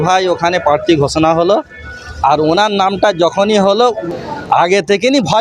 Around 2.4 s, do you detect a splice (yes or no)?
no